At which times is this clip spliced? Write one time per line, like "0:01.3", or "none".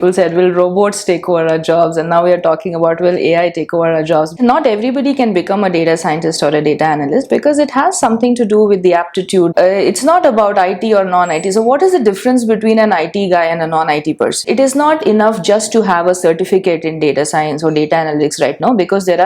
0:04.3
0:09.5
0:14.5